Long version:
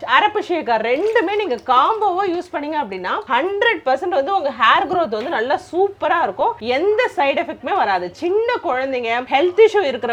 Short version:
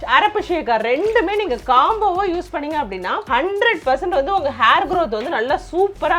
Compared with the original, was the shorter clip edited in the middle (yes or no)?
no